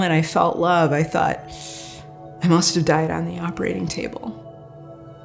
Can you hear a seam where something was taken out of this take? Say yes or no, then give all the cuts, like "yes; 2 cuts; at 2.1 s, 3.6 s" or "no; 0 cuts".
yes; 1 cut; at 4.3 s